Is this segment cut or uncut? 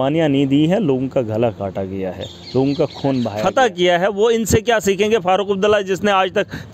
cut